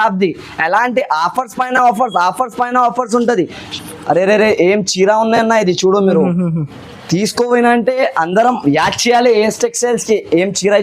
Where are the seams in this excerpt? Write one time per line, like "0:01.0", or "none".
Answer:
0:03.6